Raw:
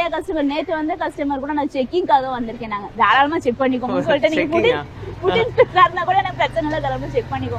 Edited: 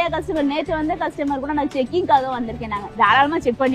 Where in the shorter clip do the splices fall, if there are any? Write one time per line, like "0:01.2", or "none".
none